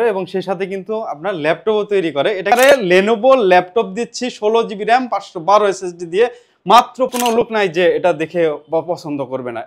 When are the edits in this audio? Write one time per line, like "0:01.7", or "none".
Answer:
0:02.5
0:07.1